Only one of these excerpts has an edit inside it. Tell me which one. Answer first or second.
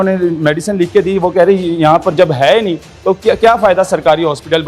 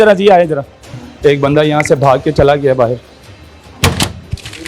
second